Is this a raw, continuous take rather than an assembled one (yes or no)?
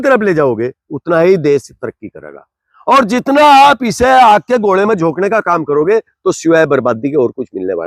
yes